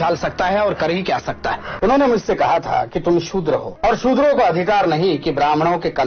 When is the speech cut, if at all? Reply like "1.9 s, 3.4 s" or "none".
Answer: 1.6 s, 3.7 s